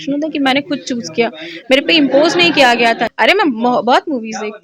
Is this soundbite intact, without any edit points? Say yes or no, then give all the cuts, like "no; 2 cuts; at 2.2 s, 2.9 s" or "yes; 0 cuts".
no; 1 cut; at 3.0 s